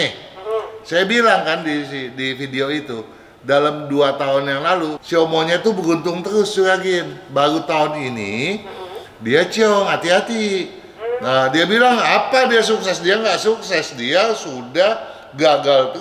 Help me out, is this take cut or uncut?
cut